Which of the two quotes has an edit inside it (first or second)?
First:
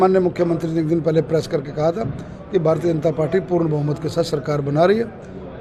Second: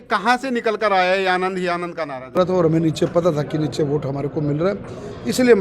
second